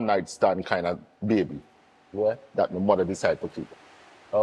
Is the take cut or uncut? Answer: uncut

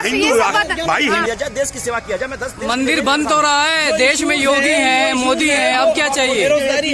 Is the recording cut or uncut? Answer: cut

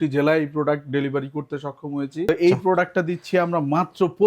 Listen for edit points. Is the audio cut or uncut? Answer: cut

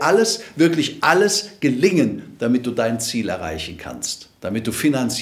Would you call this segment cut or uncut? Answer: uncut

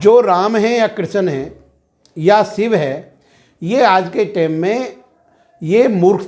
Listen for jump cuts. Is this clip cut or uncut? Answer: uncut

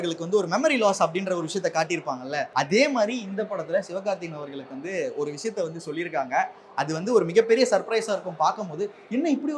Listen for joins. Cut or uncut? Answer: cut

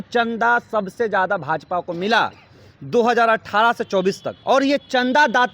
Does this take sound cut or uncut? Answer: cut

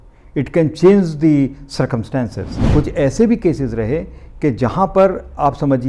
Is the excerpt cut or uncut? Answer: cut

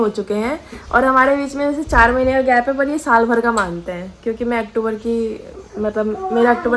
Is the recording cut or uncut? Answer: uncut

